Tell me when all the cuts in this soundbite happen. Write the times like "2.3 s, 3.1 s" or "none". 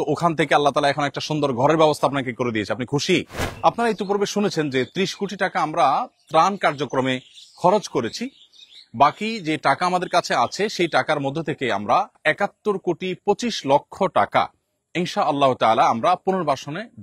3.4 s, 12.2 s